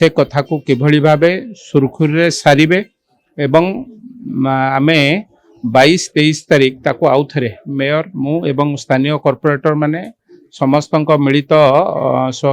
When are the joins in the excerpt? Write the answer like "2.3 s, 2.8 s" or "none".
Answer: none